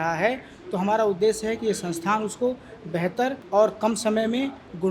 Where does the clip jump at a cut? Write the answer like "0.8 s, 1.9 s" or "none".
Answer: 3.4 s